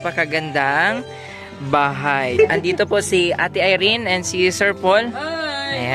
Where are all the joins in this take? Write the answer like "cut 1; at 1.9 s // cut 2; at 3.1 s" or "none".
cut 1; at 2.3 s